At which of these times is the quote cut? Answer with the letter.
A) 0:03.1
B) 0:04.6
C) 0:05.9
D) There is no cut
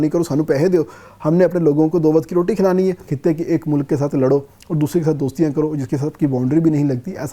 A